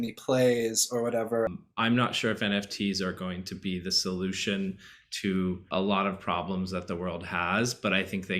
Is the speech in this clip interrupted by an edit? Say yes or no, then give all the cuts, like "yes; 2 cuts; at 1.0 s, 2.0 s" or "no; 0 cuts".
yes; 1 cut; at 1.5 s